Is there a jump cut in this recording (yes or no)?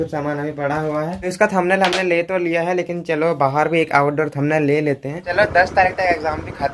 yes